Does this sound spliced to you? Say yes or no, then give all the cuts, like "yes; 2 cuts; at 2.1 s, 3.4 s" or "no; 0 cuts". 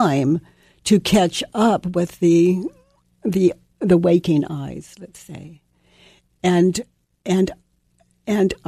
no; 0 cuts